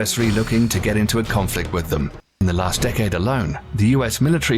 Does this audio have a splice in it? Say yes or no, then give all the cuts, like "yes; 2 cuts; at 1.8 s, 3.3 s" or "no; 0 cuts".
yes; 1 cut; at 2.2 s